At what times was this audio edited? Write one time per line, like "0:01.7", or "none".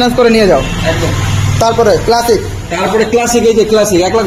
none

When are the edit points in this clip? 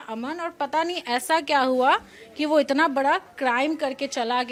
none

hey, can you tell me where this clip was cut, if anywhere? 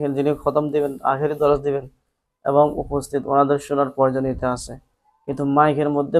none

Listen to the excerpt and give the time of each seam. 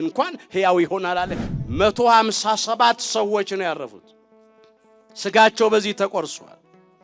0:01.4

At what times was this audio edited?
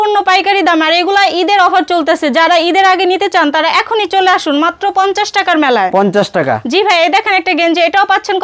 none

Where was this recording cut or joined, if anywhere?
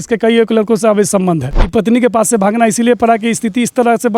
0:01.7

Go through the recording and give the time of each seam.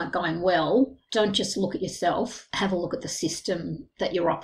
0:01.0

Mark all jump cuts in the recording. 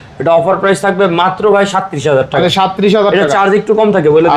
none

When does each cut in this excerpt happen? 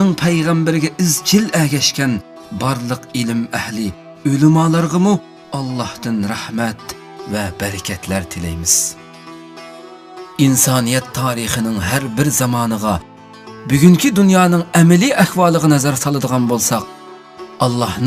0:03.7

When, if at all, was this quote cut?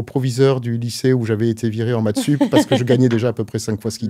none

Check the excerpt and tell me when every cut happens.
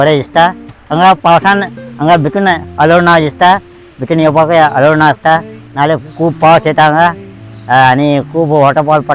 none

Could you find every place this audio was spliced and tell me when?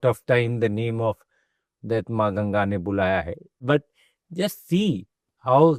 0:03.6

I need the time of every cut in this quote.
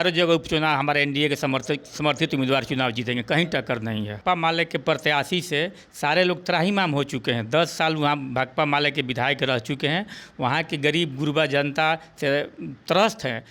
0:04.2

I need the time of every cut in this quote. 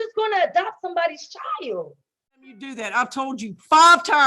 0:02.7

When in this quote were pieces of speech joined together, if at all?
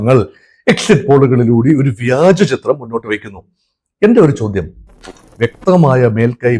0:05.2

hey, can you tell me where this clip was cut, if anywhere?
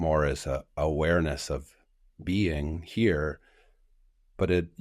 none

